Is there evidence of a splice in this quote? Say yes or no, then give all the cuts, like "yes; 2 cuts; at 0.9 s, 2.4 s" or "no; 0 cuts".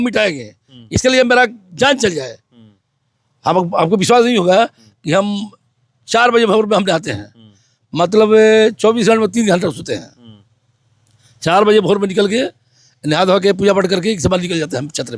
no; 0 cuts